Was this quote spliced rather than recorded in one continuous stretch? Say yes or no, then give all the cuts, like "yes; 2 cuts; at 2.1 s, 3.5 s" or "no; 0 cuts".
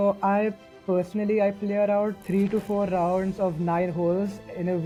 no; 0 cuts